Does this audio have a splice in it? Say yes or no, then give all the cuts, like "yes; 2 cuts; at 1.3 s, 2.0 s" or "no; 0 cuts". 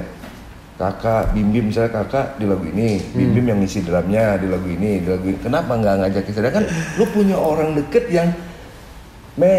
no; 0 cuts